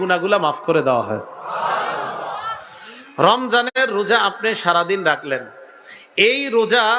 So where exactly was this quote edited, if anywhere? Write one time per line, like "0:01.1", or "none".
none